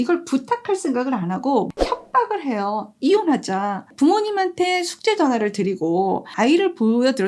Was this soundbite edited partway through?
no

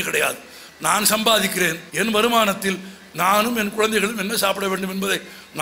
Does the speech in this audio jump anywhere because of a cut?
yes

